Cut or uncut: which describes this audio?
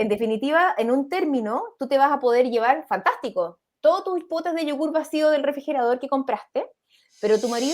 cut